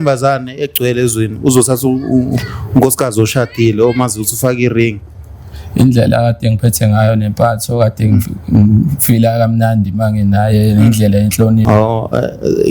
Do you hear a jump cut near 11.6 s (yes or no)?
yes